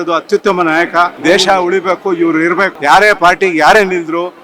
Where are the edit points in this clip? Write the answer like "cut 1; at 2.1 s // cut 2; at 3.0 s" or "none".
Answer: cut 1; at 1.2 s // cut 2; at 2.7 s

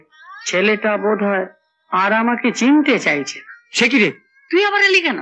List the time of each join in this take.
cut 1; at 4.3 s

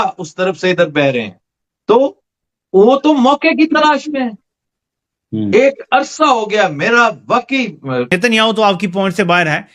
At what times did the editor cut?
cut 1; at 8.1 s

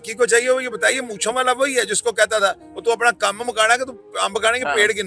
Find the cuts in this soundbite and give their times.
none

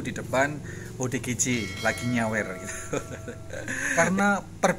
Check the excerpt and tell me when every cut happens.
cut 1; at 3.8 s

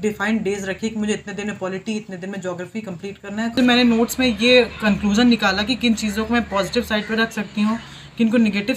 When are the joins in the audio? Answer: cut 1; at 3.6 s

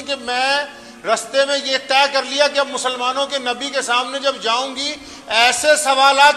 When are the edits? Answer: none

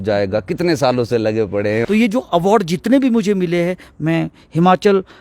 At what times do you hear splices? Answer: cut 1; at 1.8 s

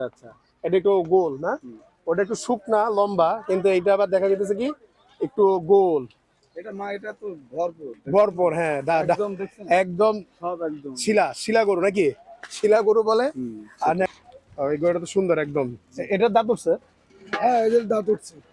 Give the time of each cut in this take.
cut 1; at 14.1 s

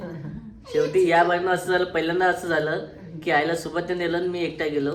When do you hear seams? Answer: none

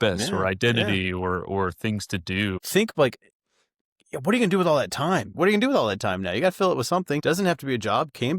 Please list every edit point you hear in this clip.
cut 1; at 2.6 s // cut 2; at 5.4 s // cut 3; at 7.2 s

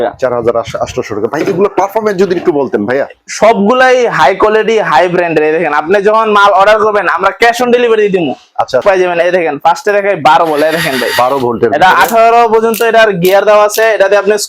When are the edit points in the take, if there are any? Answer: cut 1; at 8.8 s

